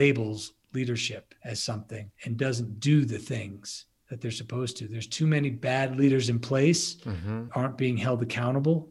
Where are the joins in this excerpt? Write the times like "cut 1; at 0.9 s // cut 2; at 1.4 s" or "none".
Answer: cut 1; at 1.3 s // cut 2; at 2.1 s